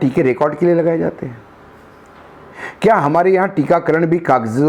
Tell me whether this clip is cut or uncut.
uncut